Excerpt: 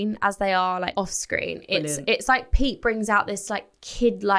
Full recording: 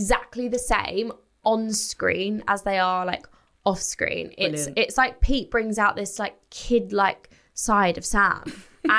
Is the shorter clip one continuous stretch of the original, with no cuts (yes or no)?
no